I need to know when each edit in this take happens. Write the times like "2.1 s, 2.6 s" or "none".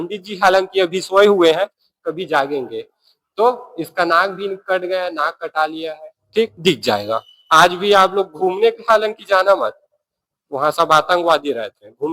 6.5 s